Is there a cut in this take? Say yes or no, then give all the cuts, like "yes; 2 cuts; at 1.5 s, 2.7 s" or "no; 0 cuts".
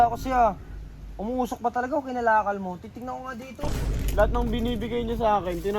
yes; 1 cut; at 3.6 s